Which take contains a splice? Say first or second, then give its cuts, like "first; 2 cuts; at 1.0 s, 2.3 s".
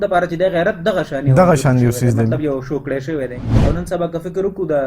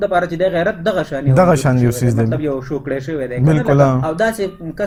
first; 1 cut; at 3.4 s